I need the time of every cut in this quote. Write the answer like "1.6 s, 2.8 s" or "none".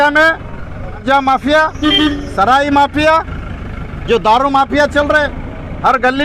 1.0 s